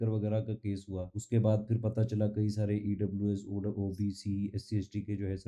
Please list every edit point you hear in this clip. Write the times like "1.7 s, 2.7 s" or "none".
1.1 s